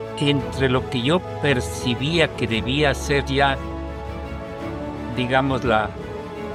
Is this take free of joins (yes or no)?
yes